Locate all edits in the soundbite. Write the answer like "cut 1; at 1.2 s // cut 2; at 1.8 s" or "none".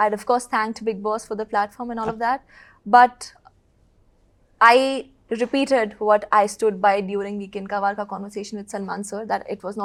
none